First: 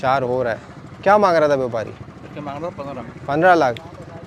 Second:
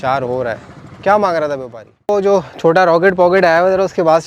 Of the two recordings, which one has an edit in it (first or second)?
second